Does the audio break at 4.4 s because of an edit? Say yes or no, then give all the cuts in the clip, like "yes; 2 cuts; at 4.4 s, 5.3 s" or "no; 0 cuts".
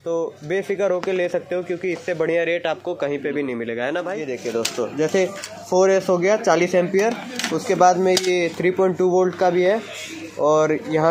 yes; 1 cut; at 4.4 s